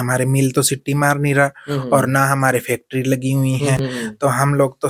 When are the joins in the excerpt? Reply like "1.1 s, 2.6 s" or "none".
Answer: none